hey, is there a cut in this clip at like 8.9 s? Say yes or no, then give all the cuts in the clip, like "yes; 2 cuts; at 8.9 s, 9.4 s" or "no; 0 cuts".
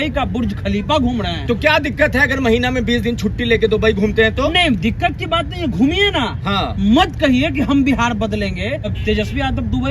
yes; 1 cut; at 8.9 s